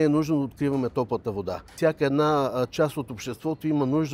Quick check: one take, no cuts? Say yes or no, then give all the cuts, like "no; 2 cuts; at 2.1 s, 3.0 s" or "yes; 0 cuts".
no; 1 cut; at 1.7 s